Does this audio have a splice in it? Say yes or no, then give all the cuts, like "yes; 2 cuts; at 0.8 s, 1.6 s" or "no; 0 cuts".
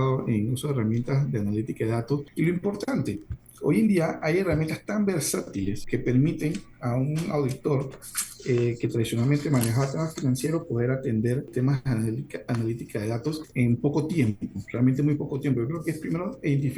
yes; 4 cuts; at 2.3 s, 5.8 s, 11.5 s, 13.5 s